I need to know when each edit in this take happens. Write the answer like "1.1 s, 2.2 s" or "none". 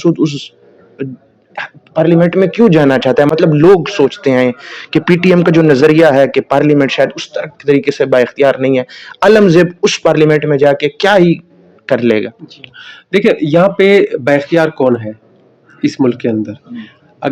none